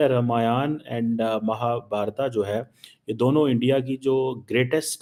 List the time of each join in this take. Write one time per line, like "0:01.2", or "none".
none